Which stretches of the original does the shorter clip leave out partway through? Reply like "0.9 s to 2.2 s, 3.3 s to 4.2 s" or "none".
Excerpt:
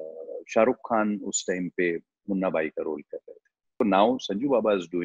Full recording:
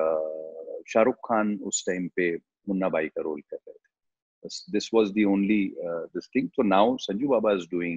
4.1 s to 6.5 s